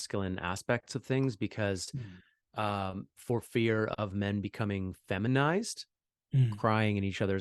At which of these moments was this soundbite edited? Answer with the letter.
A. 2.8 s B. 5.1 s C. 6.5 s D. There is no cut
C